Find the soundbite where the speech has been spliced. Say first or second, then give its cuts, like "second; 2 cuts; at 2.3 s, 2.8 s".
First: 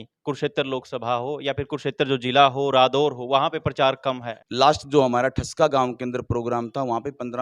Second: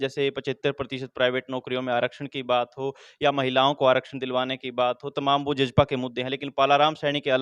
first; 1 cut; at 4.3 s